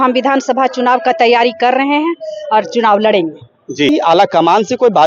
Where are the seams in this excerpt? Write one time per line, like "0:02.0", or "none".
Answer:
0:03.9